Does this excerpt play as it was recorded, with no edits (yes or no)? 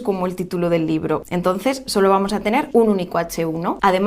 no